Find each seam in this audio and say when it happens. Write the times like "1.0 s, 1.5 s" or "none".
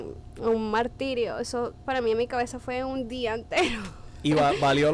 none